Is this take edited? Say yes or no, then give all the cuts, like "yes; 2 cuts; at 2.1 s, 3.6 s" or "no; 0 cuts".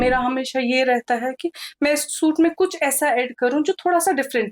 no; 0 cuts